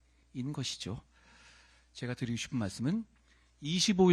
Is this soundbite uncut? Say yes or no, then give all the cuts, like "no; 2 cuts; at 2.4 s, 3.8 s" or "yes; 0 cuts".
yes; 0 cuts